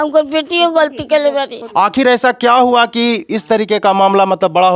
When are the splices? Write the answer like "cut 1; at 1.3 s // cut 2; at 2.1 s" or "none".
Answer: cut 1; at 1.6 s